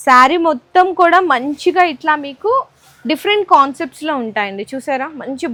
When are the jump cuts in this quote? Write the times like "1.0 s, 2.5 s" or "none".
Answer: none

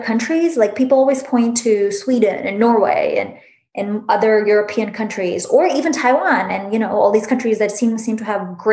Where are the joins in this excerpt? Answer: none

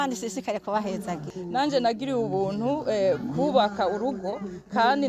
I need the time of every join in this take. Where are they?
1.3 s

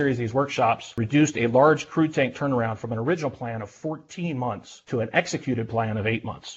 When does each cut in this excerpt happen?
1.0 s, 4.7 s

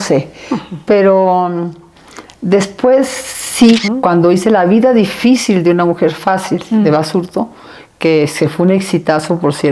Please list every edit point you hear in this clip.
3.8 s

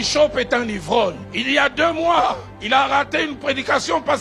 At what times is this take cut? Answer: 1.3 s, 2.5 s

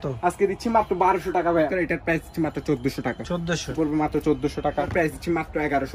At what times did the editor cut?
1.8 s, 3.7 s, 4.9 s

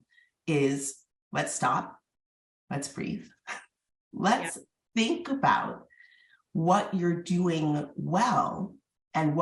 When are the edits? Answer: none

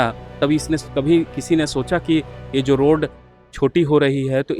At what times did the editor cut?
3.4 s

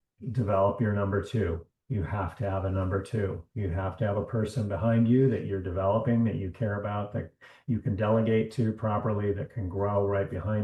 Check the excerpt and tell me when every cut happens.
none

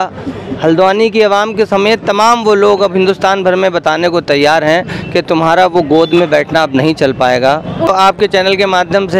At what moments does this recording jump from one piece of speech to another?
7.9 s

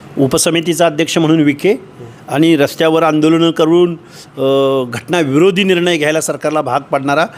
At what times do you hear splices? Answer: none

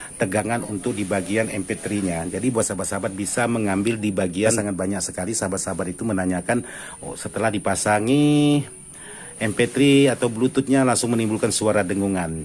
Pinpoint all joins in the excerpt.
4.6 s

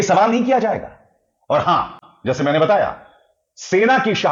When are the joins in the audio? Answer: none

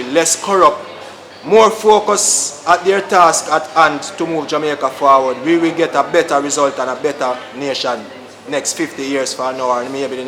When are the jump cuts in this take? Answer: none

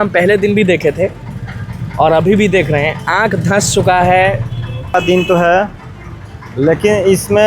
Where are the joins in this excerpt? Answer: 4.9 s

